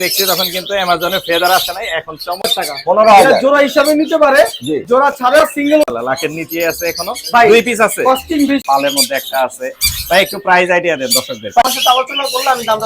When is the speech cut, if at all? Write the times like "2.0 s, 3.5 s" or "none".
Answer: 2.6 s, 5.9 s, 8.6 s, 11.6 s